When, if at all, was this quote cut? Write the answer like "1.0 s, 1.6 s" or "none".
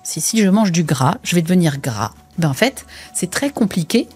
2.2 s